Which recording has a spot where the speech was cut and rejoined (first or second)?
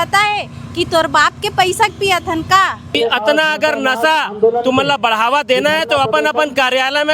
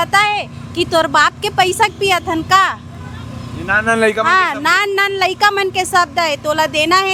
first